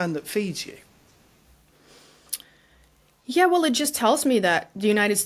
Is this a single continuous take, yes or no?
yes